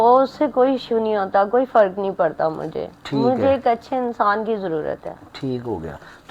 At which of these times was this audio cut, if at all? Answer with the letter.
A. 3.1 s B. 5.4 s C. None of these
C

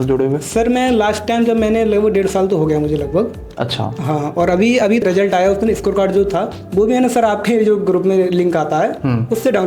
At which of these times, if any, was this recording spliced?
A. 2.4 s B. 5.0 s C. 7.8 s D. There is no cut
B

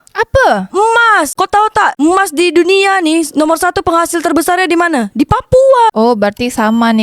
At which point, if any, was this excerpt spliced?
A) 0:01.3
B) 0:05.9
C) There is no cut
B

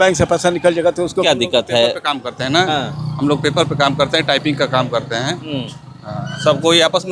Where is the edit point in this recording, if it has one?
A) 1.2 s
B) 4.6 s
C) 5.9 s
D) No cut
A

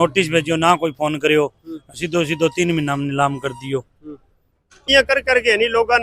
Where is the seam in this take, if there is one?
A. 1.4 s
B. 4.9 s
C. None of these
B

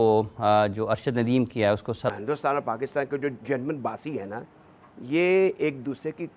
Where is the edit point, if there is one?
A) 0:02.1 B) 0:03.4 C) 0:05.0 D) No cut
A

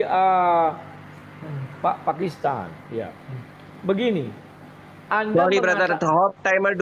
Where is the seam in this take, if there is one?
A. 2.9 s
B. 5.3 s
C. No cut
C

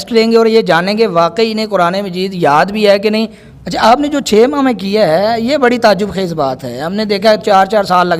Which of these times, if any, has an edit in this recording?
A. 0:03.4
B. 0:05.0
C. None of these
A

